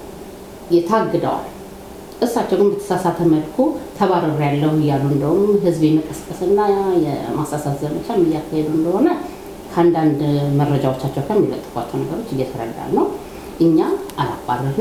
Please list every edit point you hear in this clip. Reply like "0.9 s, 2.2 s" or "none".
none